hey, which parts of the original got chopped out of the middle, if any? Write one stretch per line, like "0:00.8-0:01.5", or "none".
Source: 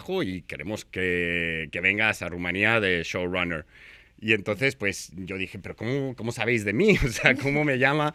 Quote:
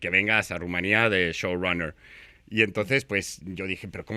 none